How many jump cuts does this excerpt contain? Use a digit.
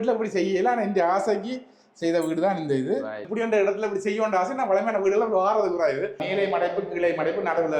2